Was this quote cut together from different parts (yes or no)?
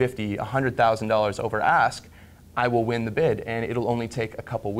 no